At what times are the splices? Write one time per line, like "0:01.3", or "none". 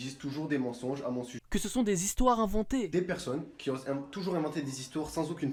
none